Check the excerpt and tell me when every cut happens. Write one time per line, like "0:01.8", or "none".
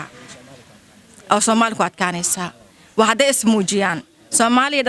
none